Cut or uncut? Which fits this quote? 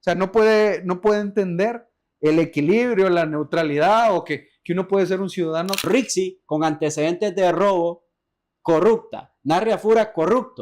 cut